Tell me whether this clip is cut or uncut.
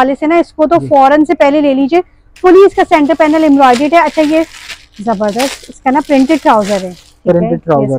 uncut